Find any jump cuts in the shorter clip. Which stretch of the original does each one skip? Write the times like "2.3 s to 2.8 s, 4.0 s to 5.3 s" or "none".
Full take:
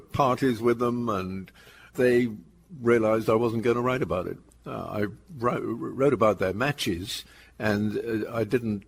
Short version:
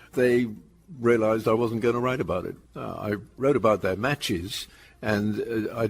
5.0 s to 5.7 s